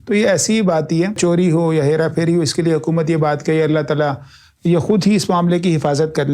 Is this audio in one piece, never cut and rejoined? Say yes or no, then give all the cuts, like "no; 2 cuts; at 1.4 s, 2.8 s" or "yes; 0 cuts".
no; 1 cut; at 1.2 s